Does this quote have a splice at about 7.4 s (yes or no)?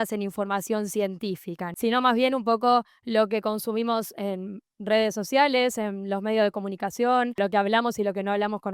yes